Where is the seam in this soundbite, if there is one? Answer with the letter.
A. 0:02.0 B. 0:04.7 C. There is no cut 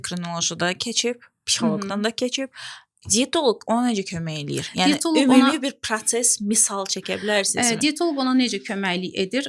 C